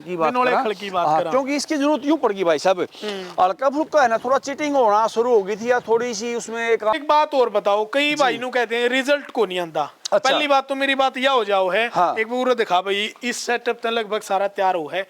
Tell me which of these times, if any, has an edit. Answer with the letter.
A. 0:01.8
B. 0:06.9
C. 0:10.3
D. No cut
B